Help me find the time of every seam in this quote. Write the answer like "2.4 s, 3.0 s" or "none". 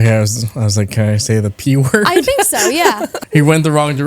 3.1 s